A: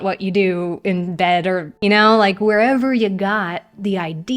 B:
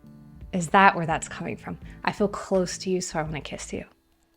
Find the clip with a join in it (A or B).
A